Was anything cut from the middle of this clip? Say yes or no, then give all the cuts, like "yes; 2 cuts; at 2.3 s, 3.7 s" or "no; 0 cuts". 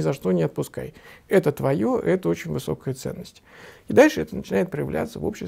no; 0 cuts